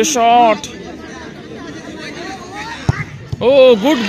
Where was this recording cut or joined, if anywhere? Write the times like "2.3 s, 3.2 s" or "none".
none